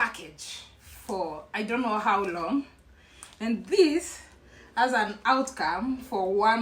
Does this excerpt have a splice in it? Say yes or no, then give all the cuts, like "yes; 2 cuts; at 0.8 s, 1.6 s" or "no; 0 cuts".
no; 0 cuts